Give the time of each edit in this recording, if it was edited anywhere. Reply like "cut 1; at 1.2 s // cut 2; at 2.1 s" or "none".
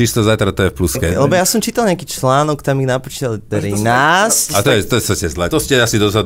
cut 1; at 1.3 s // cut 2; at 3.4 s // cut 3; at 5.5 s